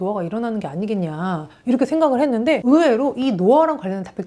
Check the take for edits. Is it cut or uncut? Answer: uncut